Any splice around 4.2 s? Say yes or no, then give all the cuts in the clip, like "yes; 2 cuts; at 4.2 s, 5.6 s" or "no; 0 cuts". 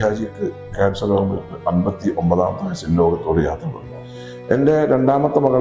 no; 0 cuts